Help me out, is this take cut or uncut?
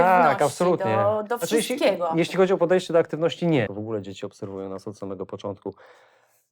cut